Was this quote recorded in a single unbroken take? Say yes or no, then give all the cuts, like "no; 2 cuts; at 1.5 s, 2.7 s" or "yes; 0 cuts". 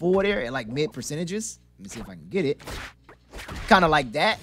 yes; 0 cuts